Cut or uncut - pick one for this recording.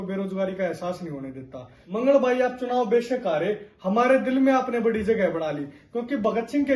cut